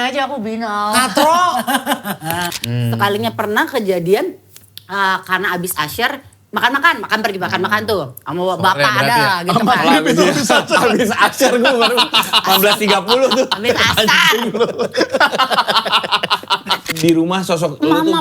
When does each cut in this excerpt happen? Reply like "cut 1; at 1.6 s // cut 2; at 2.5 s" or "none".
cut 1; at 2.5 s // cut 2; at 16.8 s